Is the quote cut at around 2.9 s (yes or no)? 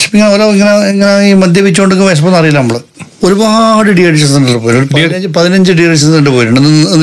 yes